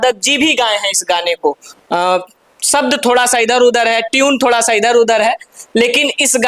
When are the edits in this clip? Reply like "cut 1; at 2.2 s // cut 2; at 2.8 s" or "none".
none